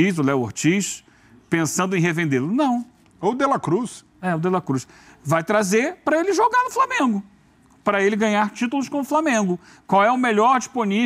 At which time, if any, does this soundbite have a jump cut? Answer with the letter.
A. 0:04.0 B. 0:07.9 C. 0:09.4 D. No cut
D